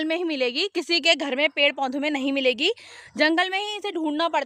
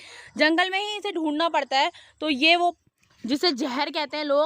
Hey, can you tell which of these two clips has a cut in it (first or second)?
second